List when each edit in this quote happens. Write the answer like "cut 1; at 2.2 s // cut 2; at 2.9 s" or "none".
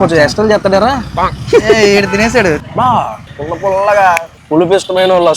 cut 1; at 2.6 s // cut 2; at 3.3 s // cut 3; at 4.4 s